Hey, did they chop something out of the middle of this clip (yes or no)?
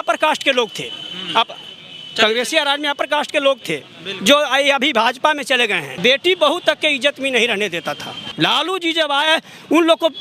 yes